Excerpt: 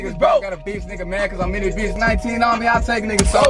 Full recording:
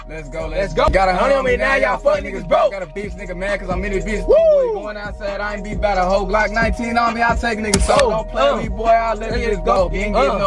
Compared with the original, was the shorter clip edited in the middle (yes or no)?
yes